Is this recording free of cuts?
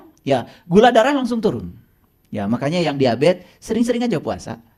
yes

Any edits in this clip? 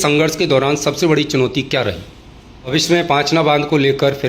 yes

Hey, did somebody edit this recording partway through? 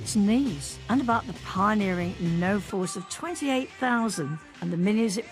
no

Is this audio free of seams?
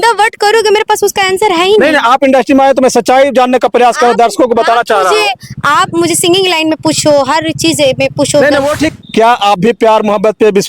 no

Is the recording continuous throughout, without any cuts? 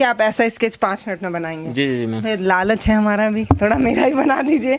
yes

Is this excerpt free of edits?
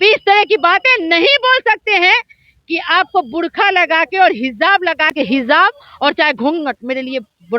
no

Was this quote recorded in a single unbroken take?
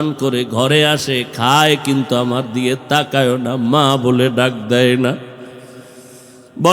yes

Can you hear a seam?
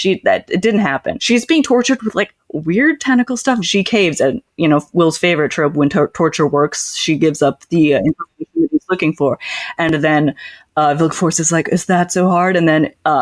yes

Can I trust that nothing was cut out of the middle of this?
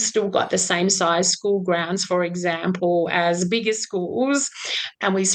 yes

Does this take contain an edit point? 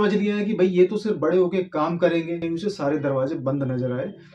yes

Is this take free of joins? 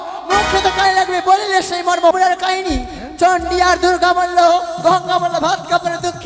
no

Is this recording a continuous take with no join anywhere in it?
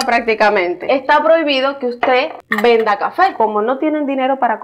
no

